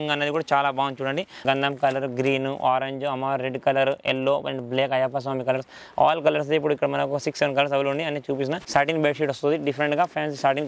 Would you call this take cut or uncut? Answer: cut